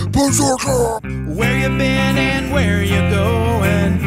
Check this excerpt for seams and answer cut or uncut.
cut